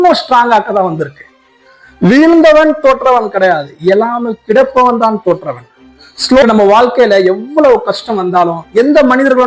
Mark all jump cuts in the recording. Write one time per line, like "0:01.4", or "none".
0:06.4